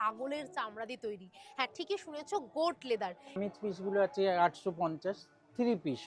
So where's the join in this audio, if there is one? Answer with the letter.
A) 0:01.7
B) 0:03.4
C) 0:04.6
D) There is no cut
B